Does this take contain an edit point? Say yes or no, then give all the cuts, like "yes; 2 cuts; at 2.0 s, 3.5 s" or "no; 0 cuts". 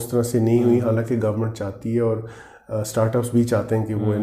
no; 0 cuts